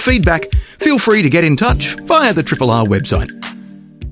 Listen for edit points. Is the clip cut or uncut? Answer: cut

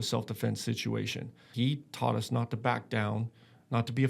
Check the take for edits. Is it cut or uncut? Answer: cut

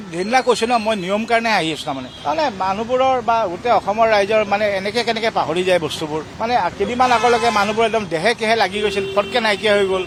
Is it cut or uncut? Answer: uncut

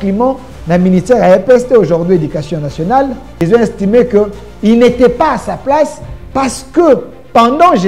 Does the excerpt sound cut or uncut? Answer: cut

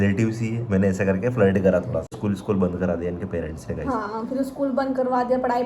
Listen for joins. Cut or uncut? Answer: cut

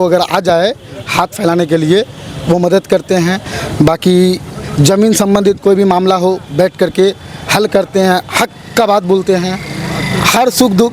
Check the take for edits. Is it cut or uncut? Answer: uncut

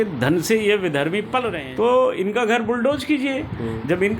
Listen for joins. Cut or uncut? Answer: cut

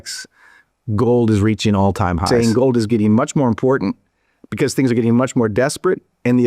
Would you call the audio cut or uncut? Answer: cut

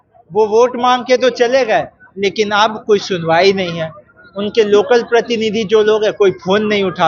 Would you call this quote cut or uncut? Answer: uncut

